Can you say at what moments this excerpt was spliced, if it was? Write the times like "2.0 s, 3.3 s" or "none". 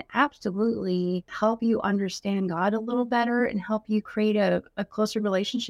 1.3 s